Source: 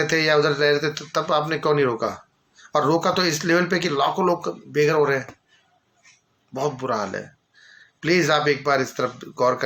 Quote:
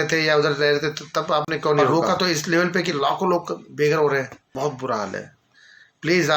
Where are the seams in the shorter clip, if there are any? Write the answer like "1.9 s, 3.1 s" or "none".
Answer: 1.9 s, 4.4 s